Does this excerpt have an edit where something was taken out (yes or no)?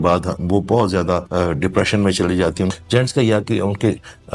yes